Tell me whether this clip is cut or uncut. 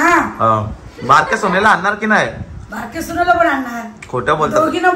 uncut